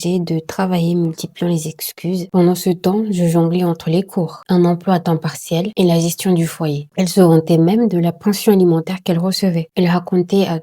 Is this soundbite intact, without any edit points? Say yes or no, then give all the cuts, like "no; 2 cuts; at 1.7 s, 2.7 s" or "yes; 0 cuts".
no; 3 cuts; at 2.2 s, 6.8 s, 9.6 s